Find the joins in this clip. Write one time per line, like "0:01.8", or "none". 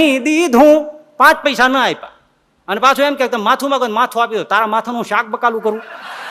none